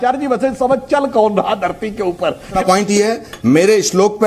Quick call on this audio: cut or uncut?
cut